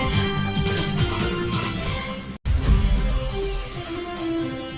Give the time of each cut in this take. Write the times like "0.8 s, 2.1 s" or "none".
2.4 s, 3.7 s